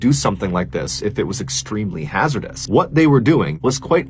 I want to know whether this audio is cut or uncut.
cut